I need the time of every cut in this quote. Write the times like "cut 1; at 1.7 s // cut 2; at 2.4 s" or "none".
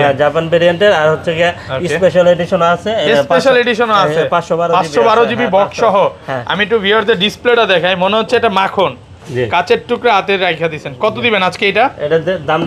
none